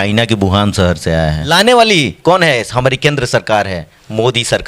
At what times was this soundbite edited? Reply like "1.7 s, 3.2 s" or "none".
1.5 s